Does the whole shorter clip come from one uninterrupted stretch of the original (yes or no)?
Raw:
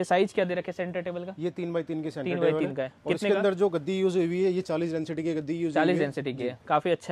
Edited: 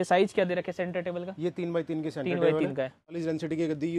no